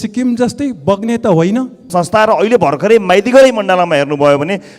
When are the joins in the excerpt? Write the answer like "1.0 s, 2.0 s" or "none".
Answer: 1.8 s